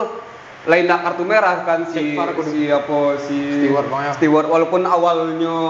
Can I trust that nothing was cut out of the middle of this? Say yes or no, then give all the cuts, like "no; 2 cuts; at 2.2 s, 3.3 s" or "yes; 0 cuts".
yes; 0 cuts